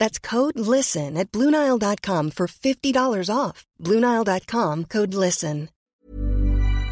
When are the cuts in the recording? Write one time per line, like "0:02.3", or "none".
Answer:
0:05.7